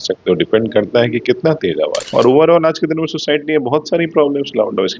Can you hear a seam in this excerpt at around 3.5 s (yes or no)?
no